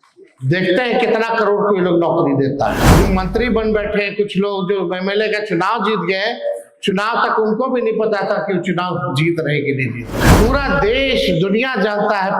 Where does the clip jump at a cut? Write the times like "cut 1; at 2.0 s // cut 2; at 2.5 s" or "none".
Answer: cut 1; at 2.9 s // cut 2; at 10.2 s

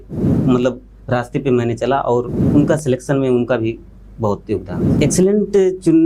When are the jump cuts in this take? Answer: cut 1; at 5.0 s

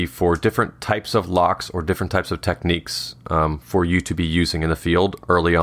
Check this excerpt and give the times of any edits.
none

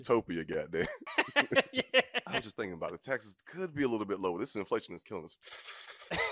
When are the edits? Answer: cut 1; at 1.0 s // cut 2; at 2.4 s

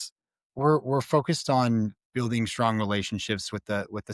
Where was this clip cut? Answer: none

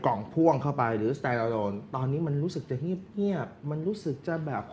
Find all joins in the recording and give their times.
none

